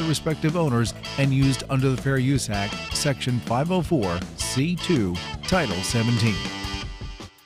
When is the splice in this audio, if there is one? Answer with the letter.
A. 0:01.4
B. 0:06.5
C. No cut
B